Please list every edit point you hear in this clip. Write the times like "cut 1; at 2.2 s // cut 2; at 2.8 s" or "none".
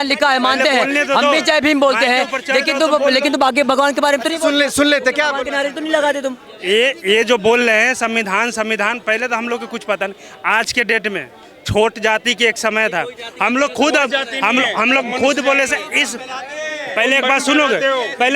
none